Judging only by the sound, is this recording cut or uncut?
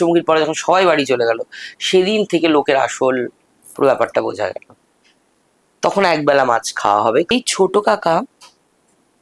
cut